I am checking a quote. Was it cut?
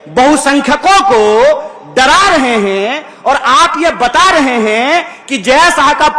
no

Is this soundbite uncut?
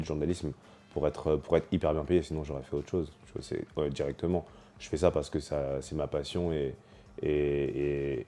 yes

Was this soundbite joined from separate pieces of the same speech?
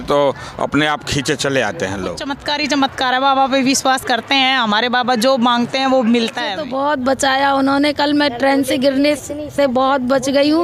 yes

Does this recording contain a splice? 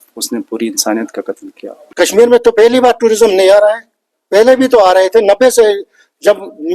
yes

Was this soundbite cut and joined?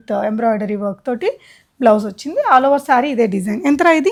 no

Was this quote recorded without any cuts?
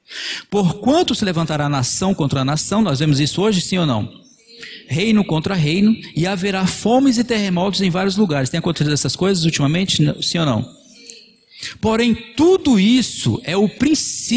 yes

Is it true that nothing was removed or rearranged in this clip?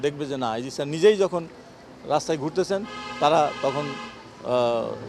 yes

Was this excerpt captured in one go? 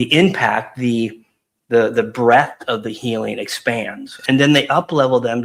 no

